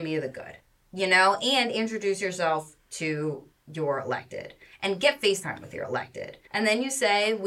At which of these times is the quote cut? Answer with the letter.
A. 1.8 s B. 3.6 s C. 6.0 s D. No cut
C